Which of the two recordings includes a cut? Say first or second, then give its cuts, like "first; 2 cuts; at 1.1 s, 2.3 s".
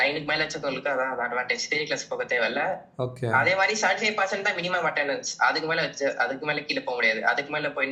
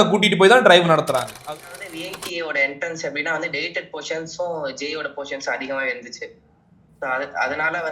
second; 1 cut; at 1.3 s